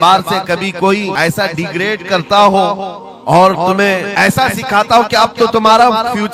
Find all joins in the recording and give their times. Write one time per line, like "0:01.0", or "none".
0:01.1
0:04.1